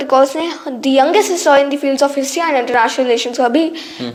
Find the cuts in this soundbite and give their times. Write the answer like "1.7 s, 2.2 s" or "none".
none